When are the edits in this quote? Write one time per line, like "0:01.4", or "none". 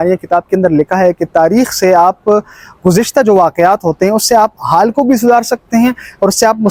none